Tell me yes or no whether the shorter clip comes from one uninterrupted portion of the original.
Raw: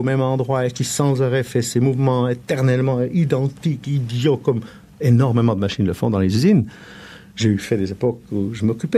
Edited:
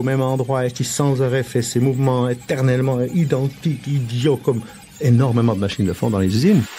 yes